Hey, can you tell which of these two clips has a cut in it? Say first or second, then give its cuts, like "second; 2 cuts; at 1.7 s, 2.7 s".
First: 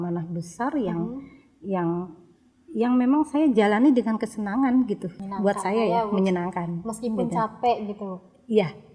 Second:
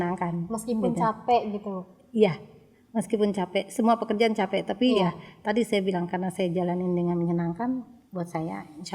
first; 1 cut; at 5.2 s